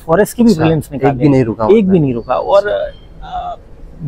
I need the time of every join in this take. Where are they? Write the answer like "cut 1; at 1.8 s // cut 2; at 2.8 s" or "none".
none